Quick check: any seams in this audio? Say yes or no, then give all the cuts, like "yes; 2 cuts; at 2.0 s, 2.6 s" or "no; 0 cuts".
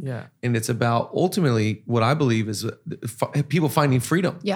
no; 0 cuts